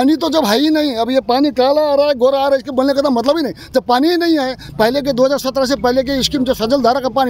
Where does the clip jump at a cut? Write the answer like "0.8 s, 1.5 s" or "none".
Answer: none